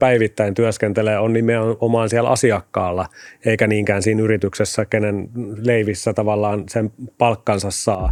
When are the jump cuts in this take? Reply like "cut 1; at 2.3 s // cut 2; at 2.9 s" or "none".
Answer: none